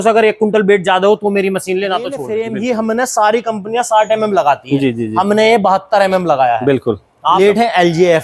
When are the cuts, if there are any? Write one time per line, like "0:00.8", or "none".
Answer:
0:02.3
0:07.4